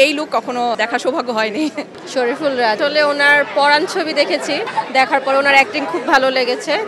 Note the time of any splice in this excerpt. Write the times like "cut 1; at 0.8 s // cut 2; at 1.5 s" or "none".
cut 1; at 0.8 s // cut 2; at 1.9 s // cut 3; at 2.8 s // cut 4; at 4.6 s